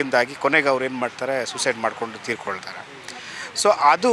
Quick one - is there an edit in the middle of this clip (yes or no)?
no